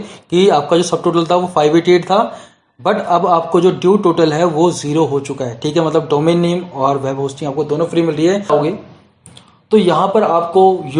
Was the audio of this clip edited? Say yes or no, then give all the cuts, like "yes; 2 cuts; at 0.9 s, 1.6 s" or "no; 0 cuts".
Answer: yes; 1 cut; at 8.5 s